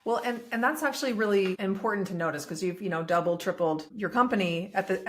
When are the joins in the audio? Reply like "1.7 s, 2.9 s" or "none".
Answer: 1.6 s, 3.9 s